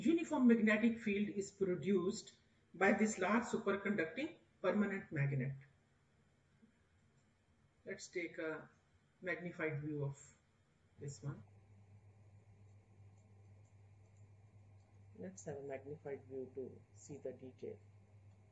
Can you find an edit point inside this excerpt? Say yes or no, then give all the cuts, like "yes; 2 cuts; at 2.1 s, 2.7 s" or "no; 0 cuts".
yes; 1 cut; at 11.4 s